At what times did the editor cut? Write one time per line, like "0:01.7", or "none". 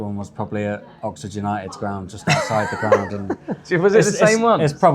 none